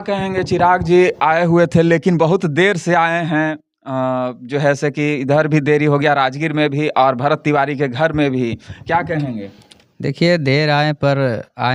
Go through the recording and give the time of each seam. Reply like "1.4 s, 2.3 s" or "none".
none